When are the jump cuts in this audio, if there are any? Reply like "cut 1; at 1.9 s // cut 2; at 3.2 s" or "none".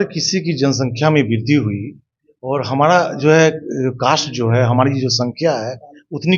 none

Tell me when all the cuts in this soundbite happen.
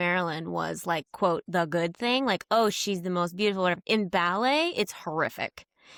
none

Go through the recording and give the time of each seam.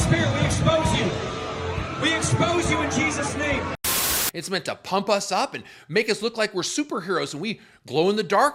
cut 1; at 3.8 s

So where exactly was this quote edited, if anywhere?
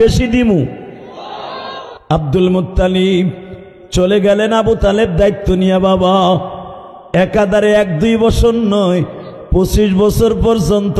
cut 1; at 2.0 s

